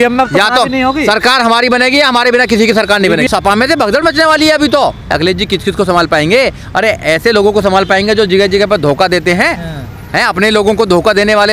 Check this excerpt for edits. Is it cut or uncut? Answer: cut